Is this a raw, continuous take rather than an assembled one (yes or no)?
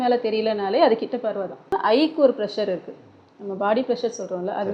no